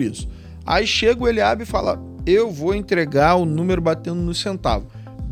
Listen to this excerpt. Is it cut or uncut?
uncut